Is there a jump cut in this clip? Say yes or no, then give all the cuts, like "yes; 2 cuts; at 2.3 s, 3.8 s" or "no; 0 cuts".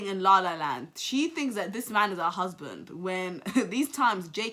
no; 0 cuts